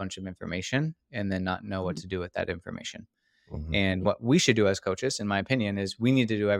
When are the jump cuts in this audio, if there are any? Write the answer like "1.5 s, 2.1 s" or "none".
4.0 s